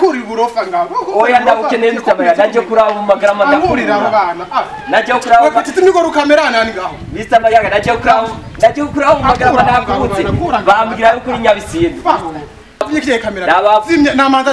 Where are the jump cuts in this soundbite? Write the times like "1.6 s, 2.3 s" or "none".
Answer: 12.9 s